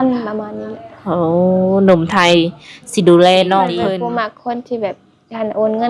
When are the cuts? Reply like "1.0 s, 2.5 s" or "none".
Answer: 3.7 s